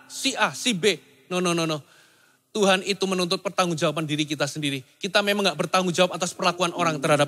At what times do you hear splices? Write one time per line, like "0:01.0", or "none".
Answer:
none